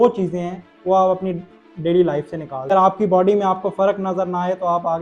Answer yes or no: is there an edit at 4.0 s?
no